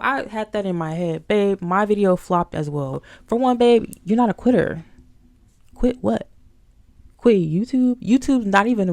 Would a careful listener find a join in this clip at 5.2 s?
no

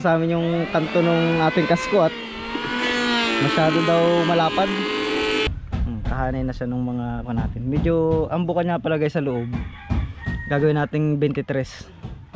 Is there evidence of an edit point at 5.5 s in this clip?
yes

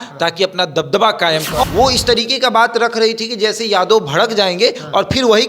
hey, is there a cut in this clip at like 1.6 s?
yes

